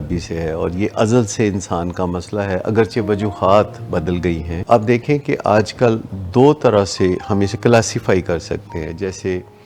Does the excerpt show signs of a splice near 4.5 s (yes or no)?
yes